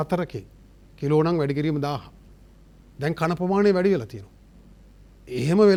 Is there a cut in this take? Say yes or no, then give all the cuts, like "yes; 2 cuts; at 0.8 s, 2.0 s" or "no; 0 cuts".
no; 0 cuts